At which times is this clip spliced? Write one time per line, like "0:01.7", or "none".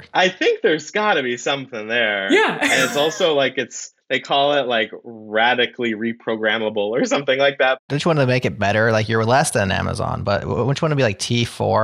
none